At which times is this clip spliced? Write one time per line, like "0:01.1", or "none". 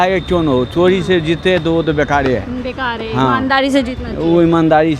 none